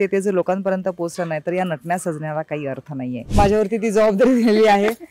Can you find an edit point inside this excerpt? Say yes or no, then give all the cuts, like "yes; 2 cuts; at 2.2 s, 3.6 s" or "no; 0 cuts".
yes; 1 cut; at 3.3 s